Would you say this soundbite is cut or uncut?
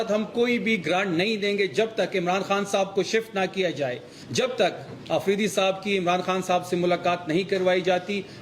cut